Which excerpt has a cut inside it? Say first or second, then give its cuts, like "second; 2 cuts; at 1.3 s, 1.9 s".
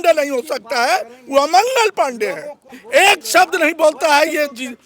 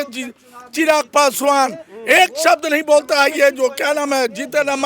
first; 1 cut; at 2.7 s